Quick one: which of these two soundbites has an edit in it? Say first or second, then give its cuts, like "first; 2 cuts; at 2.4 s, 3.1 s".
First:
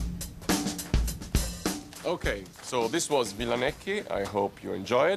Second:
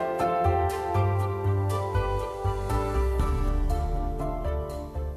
second; 1 cut; at 1.5 s